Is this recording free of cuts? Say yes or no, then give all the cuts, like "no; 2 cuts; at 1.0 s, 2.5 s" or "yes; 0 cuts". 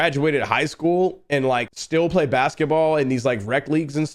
no; 1 cut; at 1.8 s